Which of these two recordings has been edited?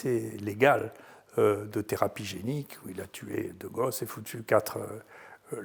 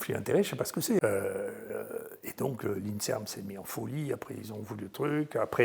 second; 1 cut; at 1.0 s

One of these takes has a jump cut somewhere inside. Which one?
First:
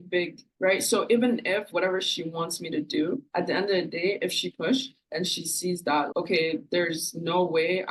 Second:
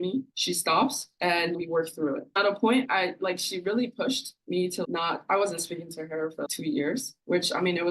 second; 1 cut; at 2.3 s

